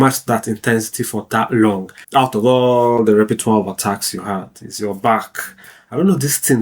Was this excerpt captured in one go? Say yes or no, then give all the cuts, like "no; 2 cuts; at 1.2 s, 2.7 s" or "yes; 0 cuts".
no; 1 cut; at 1.9 s